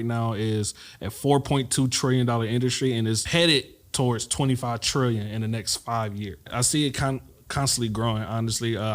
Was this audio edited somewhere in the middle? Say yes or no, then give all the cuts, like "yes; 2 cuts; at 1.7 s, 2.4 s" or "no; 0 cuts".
yes; 2 cuts; at 3.2 s, 6.5 s